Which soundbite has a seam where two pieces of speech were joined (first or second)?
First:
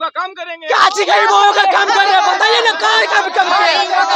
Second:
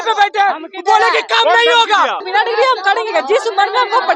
second